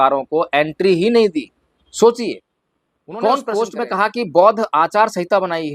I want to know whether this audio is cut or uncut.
cut